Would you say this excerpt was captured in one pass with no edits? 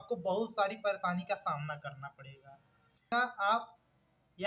no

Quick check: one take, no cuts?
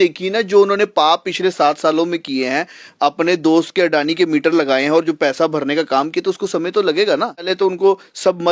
no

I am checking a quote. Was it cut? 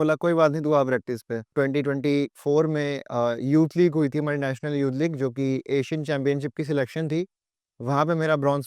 yes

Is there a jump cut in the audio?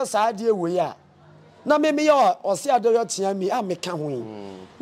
no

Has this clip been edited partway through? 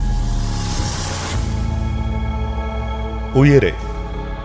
no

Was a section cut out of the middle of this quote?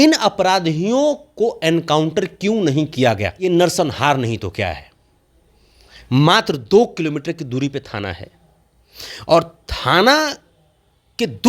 yes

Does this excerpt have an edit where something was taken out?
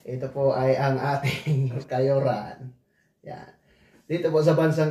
yes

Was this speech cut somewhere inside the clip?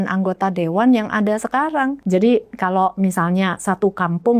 yes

